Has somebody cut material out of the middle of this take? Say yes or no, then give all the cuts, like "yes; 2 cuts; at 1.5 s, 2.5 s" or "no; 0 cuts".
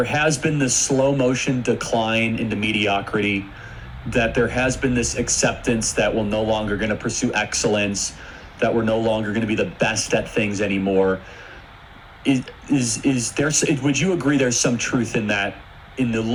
no; 0 cuts